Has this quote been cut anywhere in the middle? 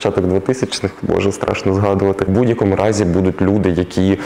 yes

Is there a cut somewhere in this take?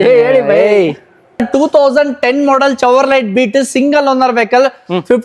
yes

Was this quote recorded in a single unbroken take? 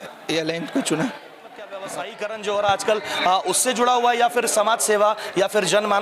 no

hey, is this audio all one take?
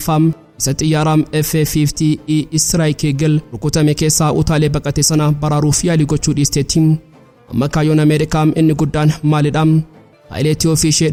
yes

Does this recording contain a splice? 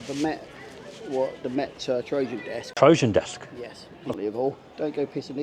yes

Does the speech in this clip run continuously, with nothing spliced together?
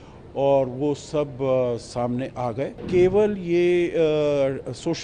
no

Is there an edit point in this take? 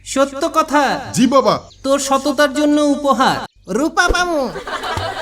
yes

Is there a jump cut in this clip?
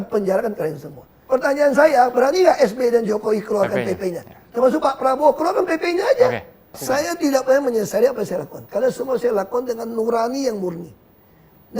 yes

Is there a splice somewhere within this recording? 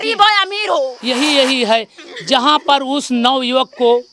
yes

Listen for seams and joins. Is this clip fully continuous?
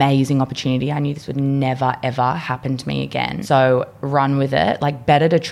no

